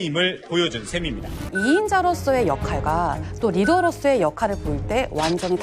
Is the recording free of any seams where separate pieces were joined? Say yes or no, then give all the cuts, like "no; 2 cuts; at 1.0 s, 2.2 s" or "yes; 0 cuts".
no; 1 cut; at 1.4 s